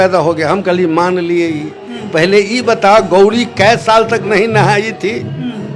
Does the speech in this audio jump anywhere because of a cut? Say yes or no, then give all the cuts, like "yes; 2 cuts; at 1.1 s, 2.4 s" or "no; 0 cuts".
no; 0 cuts